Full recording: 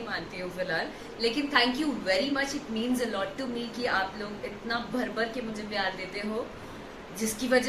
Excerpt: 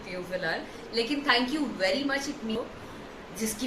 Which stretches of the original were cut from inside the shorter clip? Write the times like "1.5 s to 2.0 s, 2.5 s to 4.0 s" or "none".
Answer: 2.8 s to 6.4 s